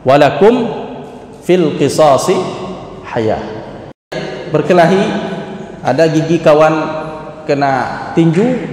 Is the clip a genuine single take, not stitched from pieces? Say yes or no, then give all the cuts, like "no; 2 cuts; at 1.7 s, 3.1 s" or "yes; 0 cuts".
no; 1 cut; at 4.3 s